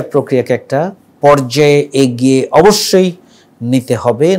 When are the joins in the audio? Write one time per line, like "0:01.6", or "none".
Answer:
0:01.0